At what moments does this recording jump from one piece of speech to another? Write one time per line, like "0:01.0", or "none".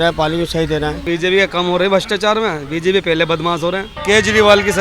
0:01.0
0:03.9